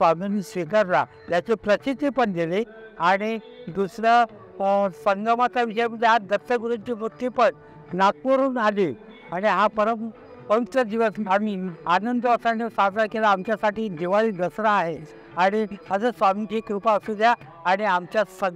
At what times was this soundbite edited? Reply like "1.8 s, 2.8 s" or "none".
none